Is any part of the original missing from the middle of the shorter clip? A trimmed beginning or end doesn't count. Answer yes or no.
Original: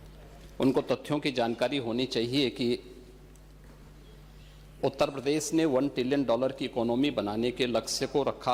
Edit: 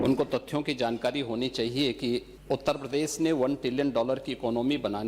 yes